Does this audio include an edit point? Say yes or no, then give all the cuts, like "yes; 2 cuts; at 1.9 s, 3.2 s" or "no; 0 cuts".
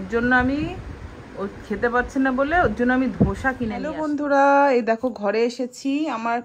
yes; 1 cut; at 3.9 s